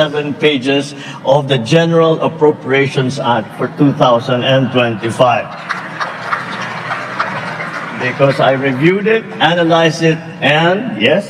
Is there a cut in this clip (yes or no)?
no